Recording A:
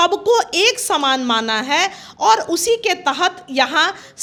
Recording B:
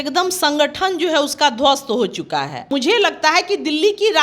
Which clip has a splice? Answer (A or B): B